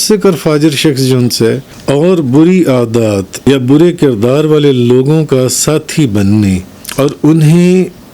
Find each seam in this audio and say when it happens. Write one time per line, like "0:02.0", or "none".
0:01.7
0:03.3
0:06.8